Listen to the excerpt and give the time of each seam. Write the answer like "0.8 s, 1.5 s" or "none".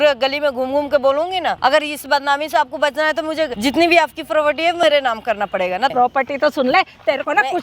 1.6 s, 3.5 s, 5.9 s